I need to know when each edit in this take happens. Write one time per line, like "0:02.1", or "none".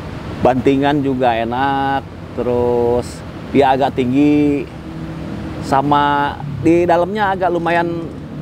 none